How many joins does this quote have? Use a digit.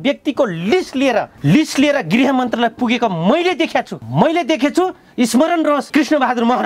3